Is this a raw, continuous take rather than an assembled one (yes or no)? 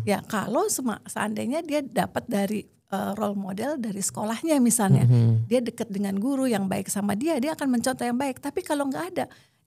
yes